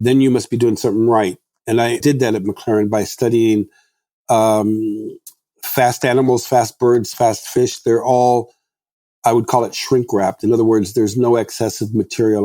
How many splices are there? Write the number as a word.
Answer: one